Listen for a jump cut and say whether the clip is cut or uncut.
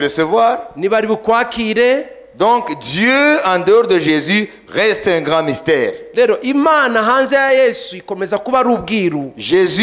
uncut